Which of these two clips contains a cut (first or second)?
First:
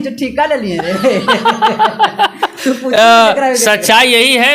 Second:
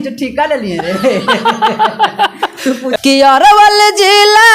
second